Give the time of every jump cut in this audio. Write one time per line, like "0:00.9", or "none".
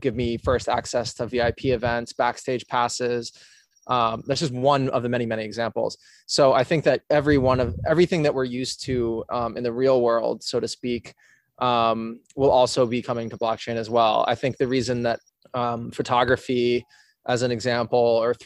none